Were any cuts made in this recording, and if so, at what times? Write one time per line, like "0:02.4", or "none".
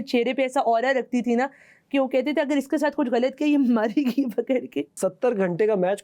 0:05.0